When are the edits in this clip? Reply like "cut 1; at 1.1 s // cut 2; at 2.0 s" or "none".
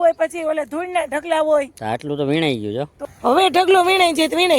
cut 1; at 2.9 s